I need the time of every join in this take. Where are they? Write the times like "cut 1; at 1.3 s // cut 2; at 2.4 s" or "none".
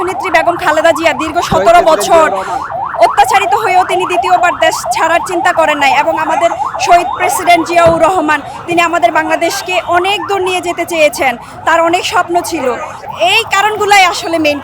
cut 1; at 13.0 s